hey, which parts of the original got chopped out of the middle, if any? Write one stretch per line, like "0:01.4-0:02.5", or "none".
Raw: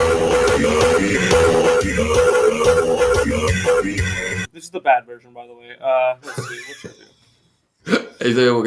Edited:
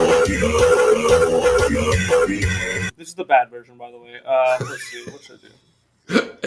0:06.1-0:06.4